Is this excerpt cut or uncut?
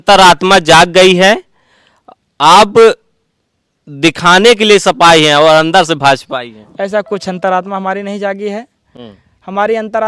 uncut